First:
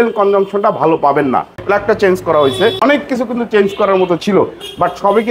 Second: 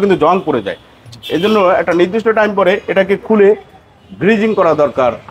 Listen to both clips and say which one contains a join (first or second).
first